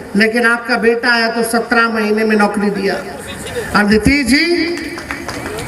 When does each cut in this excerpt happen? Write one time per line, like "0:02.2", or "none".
none